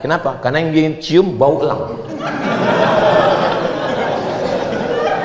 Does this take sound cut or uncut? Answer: uncut